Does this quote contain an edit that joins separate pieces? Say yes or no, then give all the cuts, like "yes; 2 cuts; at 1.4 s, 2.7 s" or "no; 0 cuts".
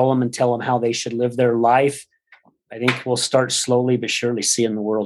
no; 0 cuts